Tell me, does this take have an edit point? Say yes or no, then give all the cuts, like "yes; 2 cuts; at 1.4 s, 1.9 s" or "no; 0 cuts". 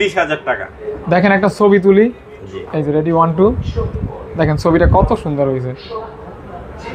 no; 0 cuts